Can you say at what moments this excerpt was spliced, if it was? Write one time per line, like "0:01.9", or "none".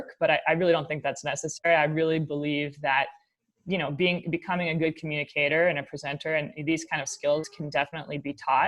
none